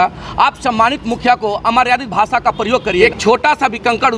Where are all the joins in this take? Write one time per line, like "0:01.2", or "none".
0:03.0